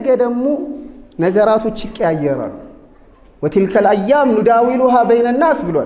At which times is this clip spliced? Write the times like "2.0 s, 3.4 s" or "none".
none